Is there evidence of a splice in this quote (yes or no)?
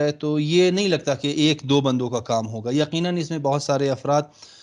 no